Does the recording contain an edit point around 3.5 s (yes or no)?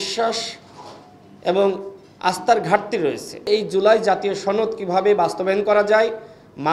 yes